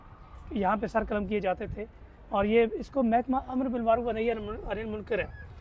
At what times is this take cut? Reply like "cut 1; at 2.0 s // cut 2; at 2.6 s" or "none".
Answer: none